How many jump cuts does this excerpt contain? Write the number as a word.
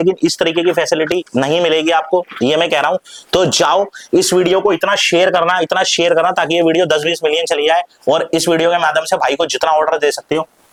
zero